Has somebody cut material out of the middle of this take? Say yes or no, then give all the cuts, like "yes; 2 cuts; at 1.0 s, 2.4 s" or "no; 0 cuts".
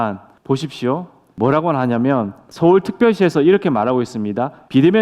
no; 0 cuts